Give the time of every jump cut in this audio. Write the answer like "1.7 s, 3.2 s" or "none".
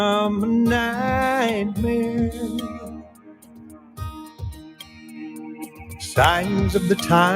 1.8 s